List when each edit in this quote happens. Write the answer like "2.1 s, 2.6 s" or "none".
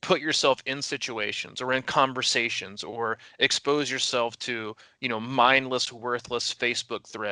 none